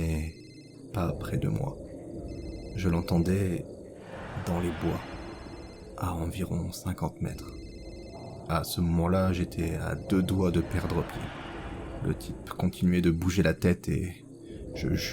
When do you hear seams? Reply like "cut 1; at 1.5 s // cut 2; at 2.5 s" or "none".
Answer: cut 1; at 11.9 s